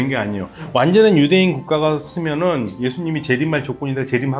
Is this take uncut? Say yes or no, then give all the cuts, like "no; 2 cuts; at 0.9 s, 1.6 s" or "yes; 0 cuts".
yes; 0 cuts